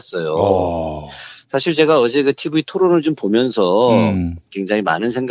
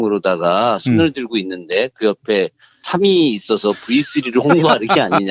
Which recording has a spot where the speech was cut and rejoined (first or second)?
first